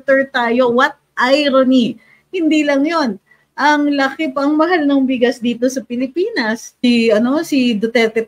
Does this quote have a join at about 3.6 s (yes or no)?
no